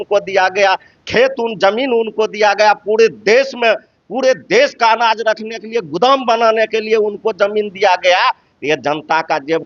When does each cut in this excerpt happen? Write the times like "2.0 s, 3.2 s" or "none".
none